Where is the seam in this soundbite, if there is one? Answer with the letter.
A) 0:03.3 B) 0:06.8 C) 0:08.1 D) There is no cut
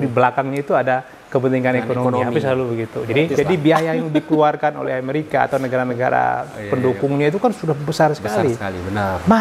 A